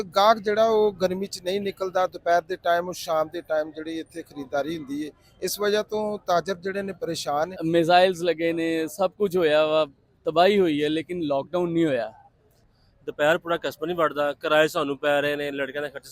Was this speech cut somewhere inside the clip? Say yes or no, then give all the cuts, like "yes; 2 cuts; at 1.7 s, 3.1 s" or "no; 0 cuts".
yes; 2 cuts; at 7.5 s, 12.7 s